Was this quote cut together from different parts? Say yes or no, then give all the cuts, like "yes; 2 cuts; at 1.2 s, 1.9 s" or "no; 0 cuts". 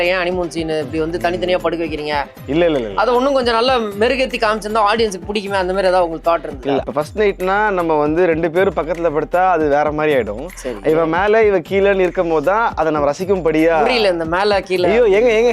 yes; 1 cut; at 6.8 s